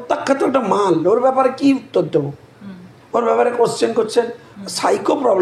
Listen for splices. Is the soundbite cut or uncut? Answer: uncut